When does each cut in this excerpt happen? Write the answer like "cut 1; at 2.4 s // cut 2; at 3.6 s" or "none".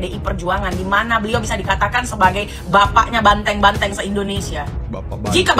none